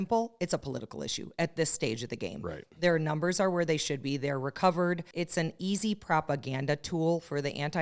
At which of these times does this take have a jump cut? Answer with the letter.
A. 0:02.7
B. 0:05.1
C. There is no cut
B